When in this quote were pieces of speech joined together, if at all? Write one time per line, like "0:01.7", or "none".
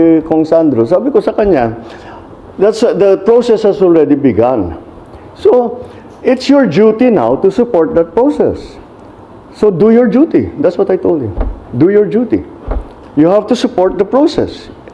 none